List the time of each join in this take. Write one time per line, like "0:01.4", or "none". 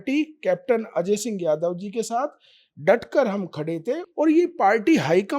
0:04.1